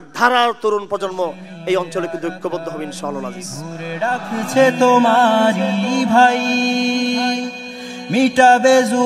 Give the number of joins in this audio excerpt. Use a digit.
1